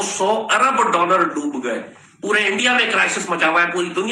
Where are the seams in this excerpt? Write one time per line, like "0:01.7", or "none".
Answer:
none